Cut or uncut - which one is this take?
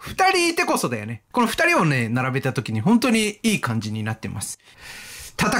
cut